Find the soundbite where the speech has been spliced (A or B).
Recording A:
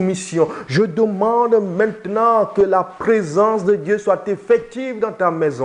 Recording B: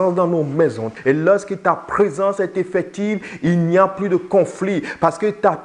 B